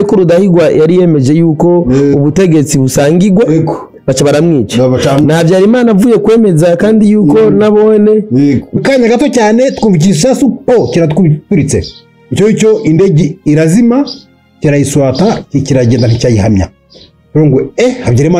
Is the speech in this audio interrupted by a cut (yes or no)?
yes